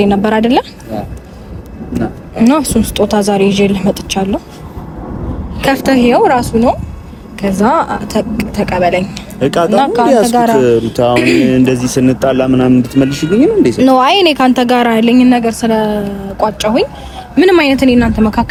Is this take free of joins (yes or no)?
yes